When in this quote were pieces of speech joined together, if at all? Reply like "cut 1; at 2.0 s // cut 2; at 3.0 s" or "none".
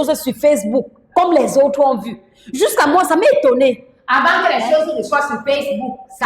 none